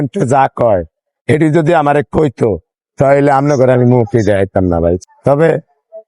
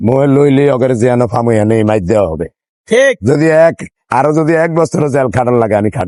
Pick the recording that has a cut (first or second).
first